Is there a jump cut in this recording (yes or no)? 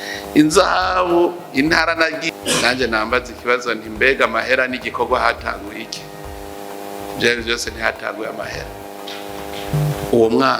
yes